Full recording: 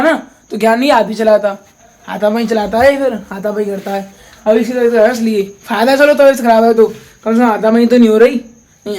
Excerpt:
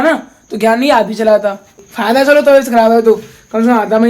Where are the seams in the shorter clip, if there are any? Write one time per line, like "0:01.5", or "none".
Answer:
0:01.9